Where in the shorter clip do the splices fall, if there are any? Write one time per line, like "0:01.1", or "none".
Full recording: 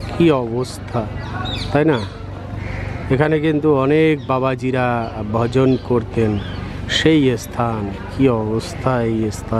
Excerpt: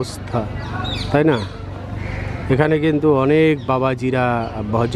none